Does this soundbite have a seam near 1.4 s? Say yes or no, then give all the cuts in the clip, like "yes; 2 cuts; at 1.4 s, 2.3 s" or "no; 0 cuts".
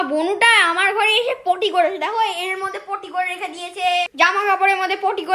no; 1 cut; at 4.1 s